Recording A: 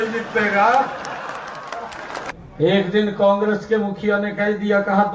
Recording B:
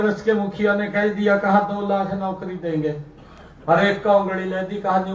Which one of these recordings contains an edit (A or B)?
A